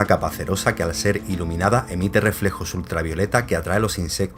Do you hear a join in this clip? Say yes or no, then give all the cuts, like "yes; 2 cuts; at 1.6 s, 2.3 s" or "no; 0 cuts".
no; 0 cuts